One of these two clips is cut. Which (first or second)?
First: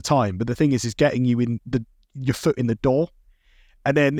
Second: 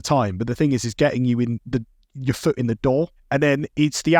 second